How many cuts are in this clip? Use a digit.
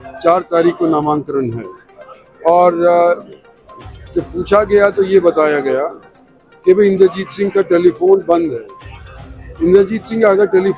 0